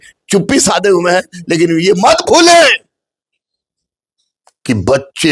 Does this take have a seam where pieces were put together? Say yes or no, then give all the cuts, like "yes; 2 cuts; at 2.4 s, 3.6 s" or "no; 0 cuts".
no; 0 cuts